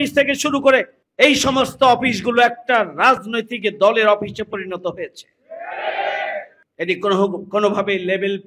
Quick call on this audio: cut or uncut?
cut